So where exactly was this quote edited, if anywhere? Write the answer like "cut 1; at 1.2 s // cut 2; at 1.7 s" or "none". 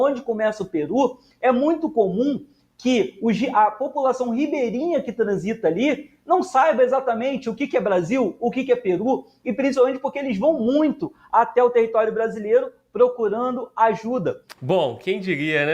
cut 1; at 14.5 s

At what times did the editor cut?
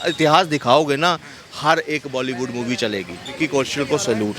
cut 1; at 3.3 s

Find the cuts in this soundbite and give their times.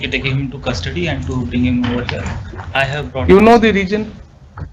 none

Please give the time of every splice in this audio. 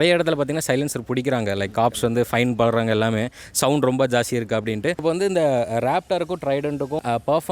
cut 1; at 5.0 s

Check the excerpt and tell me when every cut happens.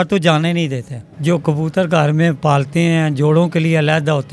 cut 1; at 1.2 s

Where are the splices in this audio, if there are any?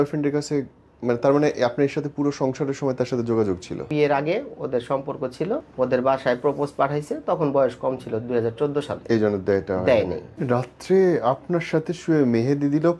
cut 1; at 3.9 s // cut 2; at 5.7 s // cut 3; at 10.3 s

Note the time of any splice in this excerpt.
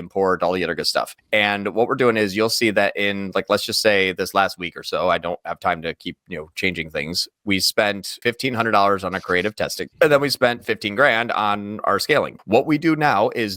cut 1; at 1.2 s // cut 2; at 8.1 s // cut 3; at 9.8 s // cut 4; at 12.4 s

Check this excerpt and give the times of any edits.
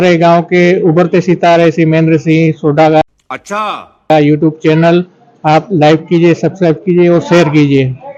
none

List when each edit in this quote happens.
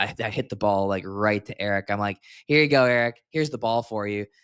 none

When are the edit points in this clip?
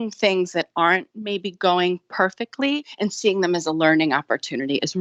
none

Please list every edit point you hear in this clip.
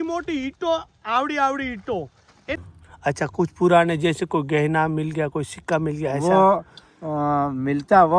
cut 1; at 2.6 s

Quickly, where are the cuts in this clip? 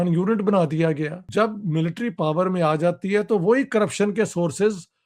cut 1; at 1.3 s

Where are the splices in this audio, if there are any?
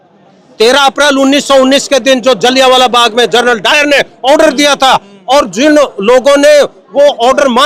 none

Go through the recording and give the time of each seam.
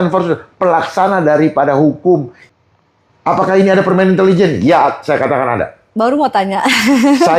cut 1; at 2.3 s

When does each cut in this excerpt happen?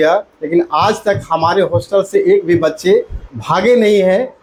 none

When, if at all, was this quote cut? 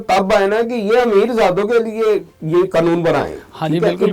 none

